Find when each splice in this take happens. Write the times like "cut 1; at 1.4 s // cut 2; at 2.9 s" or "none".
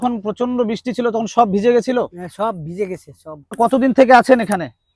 cut 1; at 3.6 s